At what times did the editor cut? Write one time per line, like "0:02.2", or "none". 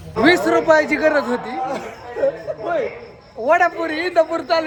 none